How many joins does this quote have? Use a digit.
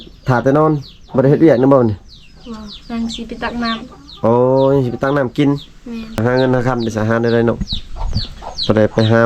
1